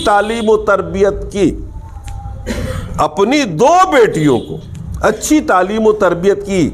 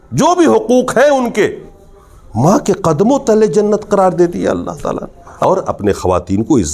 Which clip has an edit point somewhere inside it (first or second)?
second